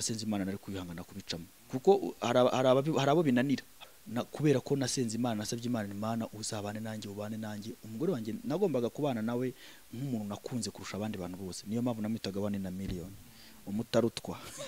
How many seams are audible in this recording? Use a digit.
1